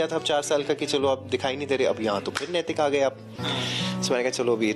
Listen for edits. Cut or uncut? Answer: uncut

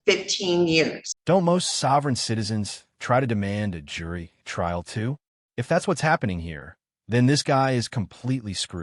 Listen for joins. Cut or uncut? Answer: uncut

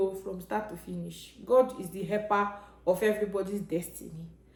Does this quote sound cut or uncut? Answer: uncut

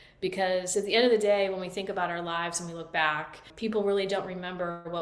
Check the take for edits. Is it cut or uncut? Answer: cut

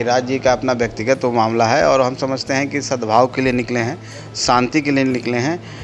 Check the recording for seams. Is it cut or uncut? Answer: uncut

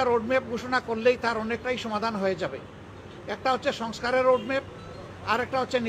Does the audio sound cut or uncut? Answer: uncut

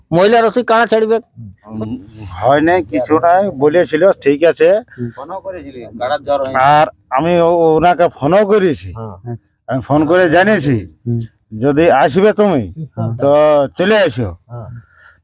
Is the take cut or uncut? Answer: cut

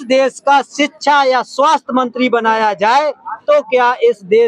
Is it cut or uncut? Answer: uncut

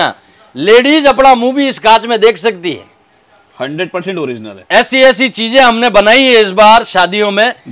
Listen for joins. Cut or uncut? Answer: uncut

